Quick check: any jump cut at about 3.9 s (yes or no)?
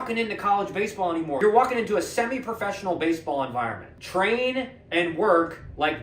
yes